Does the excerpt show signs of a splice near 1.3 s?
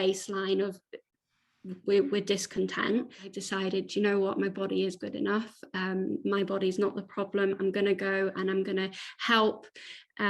no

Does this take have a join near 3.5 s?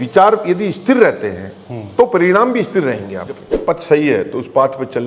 yes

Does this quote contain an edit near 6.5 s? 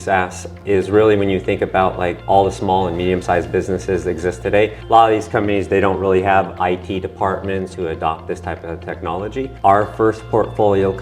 yes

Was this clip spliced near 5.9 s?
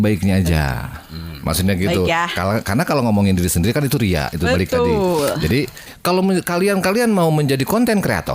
yes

